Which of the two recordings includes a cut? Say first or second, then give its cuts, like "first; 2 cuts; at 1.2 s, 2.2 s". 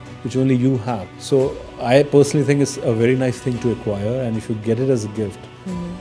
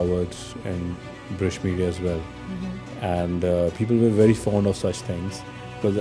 first; 1 cut; at 1.1 s